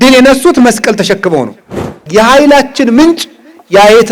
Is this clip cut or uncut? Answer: cut